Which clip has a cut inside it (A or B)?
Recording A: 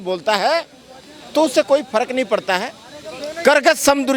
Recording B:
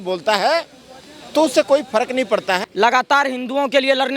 B